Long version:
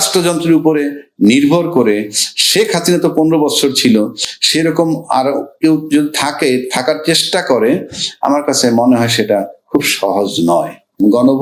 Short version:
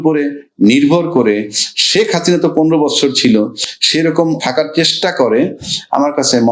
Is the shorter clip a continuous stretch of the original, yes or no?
no